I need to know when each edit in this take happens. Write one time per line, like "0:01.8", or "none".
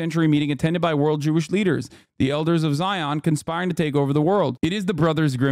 0:04.5